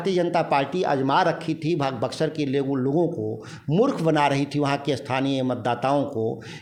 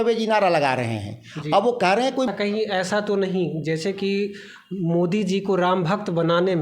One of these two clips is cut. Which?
second; 1 cut; at 2.3 s

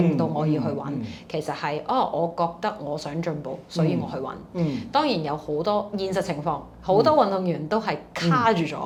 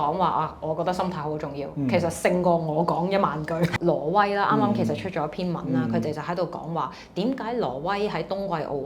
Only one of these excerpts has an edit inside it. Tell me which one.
second; 1 cut; at 3.7 s

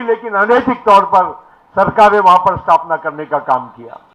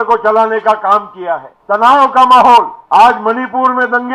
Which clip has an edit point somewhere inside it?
second; 2 cuts; at 1.5 s, 2.8 s

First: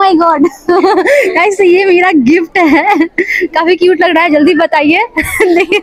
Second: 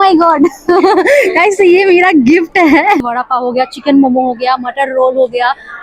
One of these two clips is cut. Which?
second; 1 cut; at 3.0 s

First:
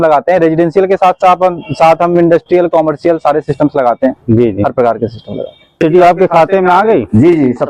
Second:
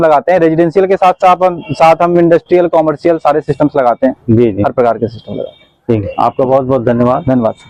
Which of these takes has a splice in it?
first; 1 cut; at 5.8 s

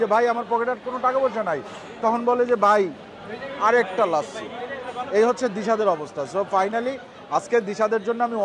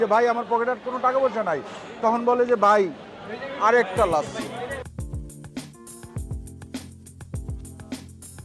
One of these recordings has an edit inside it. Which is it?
second; 1 cut; at 5.1 s

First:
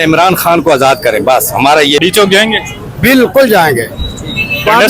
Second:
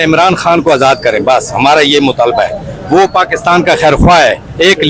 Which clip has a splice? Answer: first; 1 cut; at 2.0 s

